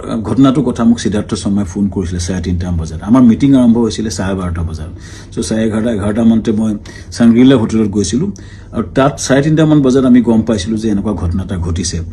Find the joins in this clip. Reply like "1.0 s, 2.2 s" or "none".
none